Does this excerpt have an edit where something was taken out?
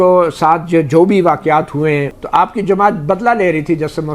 yes; 1 cut; at 2.2 s

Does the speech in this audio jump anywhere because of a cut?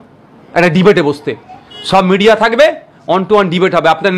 no; 0 cuts

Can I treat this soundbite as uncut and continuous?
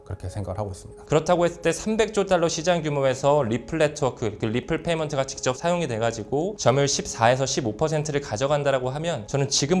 no; 1 cut; at 1.0 s

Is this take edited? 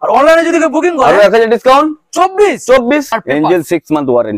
yes; 1 cut; at 3.2 s

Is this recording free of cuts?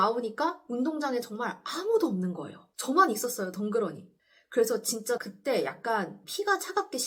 yes; 0 cuts

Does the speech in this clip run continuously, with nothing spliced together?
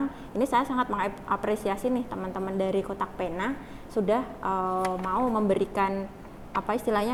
yes; 0 cuts

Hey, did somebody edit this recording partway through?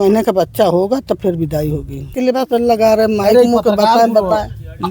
yes; 1 cut; at 2.1 s

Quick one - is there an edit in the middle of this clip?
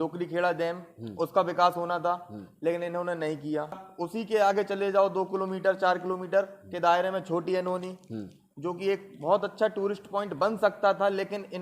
yes; 1 cut; at 3.9 s

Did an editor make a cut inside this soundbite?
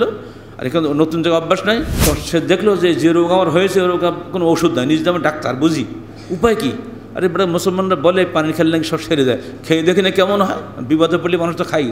yes; 1 cut; at 1.9 s

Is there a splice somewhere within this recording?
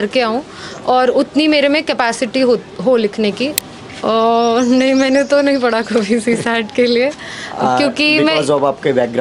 yes; 1 cut; at 3.6 s

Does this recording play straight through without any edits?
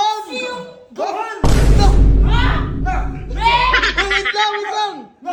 yes; 0 cuts

